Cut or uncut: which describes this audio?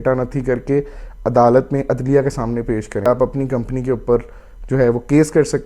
cut